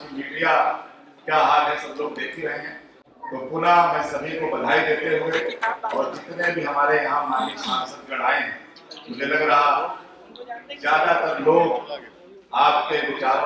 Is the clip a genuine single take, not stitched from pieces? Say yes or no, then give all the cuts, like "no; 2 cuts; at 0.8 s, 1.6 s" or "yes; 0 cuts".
yes; 0 cuts